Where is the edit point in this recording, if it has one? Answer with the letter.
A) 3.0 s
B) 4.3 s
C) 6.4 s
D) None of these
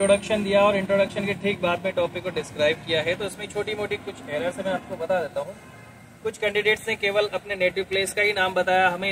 D